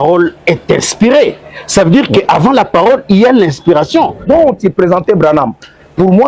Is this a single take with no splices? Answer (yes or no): no